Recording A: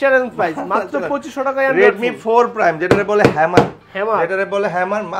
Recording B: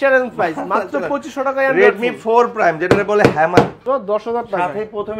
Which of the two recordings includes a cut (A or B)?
B